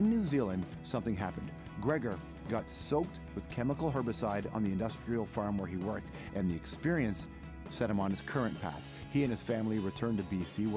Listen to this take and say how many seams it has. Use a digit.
1